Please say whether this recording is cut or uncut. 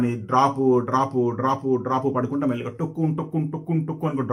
uncut